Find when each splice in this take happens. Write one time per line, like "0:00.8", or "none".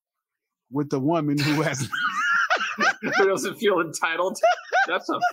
0:04.3